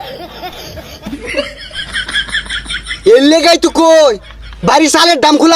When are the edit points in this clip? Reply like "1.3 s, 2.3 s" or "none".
0.9 s, 3.0 s

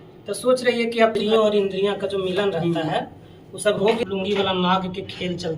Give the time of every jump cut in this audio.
1.2 s, 4.0 s

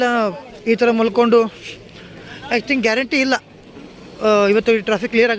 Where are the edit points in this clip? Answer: none

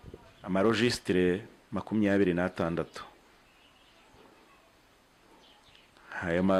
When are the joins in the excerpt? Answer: none

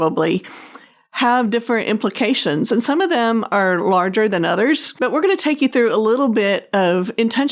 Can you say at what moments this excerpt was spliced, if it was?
4.9 s

